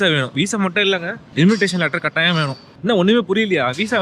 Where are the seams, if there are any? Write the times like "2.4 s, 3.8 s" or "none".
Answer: 1.2 s, 2.6 s